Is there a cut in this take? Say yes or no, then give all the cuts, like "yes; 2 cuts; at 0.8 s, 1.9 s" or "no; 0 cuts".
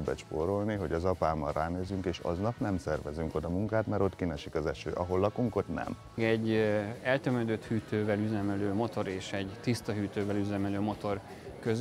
yes; 1 cut; at 6.2 s